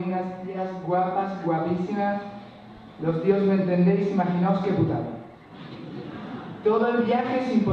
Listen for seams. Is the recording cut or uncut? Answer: uncut